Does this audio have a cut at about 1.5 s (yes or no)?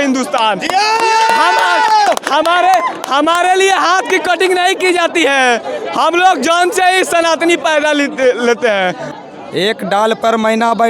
no